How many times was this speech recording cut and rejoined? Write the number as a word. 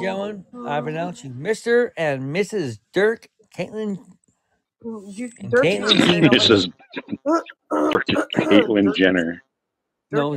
one